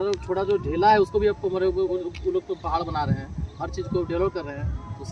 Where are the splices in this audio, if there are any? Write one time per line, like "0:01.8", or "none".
none